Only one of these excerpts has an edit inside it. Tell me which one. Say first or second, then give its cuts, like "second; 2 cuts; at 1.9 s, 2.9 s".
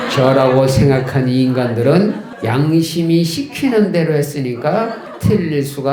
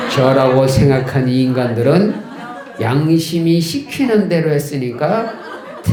first; 2 cuts; at 2.3 s, 5.1 s